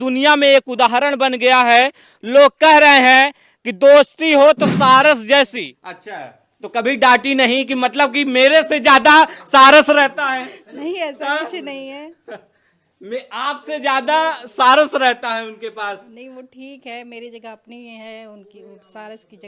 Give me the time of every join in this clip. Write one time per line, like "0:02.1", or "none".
0:05.6